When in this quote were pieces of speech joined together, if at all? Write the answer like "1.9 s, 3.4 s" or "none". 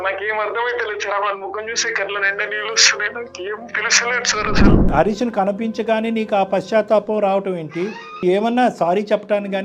4.9 s, 8.2 s